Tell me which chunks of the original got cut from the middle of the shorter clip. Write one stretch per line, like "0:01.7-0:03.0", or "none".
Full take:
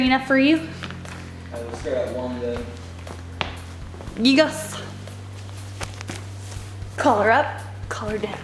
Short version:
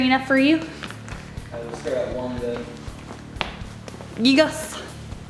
none